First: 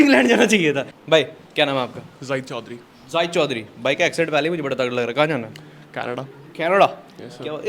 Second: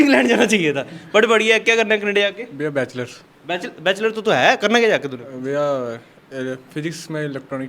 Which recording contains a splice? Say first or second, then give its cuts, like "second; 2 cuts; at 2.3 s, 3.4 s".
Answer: first; 1 cut; at 0.9 s